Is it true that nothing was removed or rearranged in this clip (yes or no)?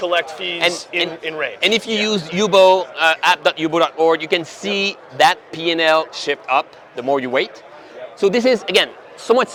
yes